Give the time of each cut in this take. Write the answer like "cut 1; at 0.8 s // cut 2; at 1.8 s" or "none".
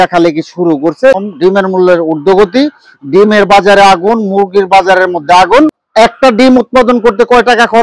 cut 1; at 1.2 s // cut 2; at 5.8 s